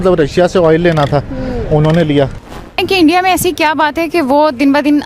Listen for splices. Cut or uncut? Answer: cut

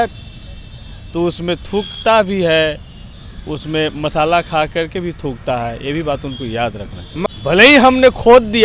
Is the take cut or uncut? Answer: cut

